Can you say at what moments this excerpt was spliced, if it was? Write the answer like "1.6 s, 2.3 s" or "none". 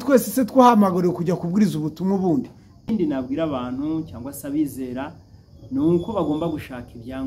2.9 s